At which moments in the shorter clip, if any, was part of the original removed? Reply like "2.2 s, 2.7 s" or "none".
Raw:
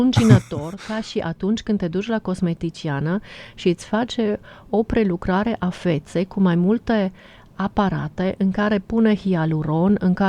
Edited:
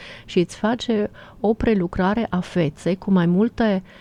none

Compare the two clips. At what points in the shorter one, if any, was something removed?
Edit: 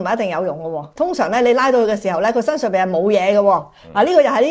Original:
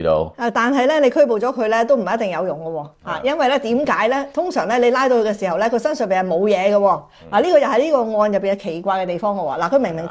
0.9 s

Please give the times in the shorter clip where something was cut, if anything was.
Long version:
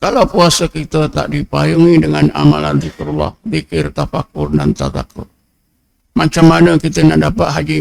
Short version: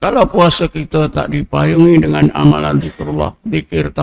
none

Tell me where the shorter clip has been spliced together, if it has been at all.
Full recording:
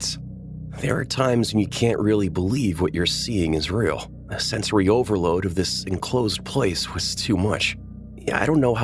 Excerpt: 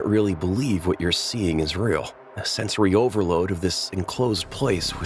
none

